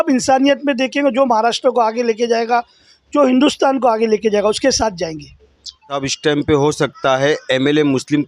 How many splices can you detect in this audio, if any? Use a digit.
1